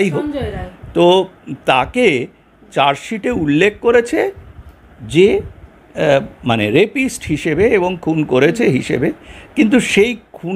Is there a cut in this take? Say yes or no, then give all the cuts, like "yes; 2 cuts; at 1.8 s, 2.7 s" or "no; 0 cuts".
no; 0 cuts